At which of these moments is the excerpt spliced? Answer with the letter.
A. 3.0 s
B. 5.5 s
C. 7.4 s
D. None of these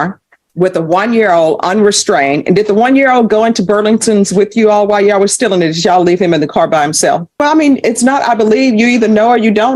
C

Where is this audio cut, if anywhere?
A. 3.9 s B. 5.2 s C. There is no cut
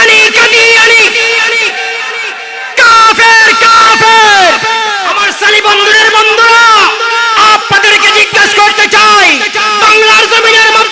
B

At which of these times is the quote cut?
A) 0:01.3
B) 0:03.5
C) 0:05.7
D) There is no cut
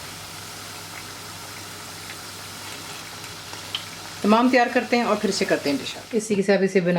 D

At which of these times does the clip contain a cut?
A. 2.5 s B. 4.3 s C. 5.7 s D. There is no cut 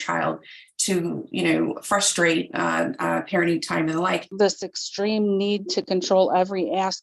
B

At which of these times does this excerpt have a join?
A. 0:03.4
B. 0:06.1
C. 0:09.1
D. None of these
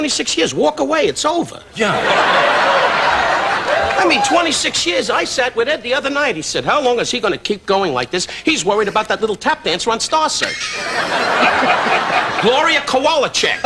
B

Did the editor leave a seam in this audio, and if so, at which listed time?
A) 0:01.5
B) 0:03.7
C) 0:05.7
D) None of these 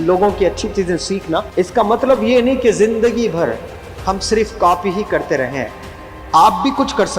A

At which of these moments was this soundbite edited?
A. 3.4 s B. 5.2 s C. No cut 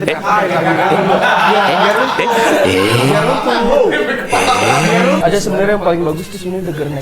B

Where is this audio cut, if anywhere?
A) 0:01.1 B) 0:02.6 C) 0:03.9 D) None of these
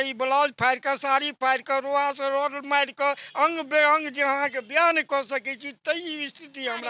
D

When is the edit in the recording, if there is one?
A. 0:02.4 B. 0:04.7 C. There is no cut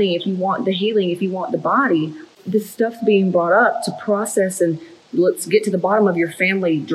A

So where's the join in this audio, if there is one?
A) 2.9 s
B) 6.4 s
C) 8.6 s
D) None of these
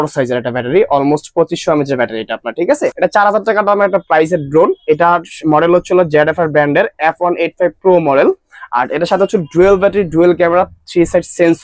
A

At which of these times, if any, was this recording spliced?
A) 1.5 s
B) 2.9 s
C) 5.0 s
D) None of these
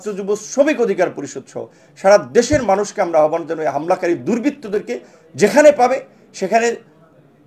D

